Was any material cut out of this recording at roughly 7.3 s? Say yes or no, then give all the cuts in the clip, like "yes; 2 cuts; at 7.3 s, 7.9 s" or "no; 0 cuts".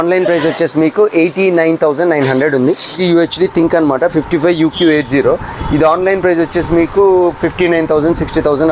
no; 1 cut; at 3.0 s